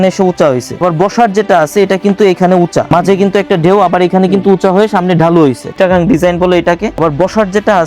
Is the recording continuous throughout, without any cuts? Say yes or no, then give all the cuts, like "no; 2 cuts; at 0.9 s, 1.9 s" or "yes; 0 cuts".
no; 4 cuts; at 0.8 s, 2.9 s, 5.7 s, 7.0 s